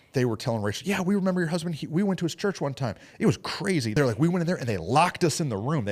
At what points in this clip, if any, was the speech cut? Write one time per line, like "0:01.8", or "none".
0:03.9